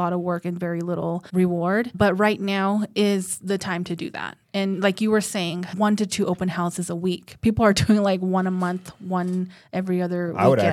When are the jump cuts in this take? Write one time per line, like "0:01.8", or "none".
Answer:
0:01.2
0:01.9
0:05.7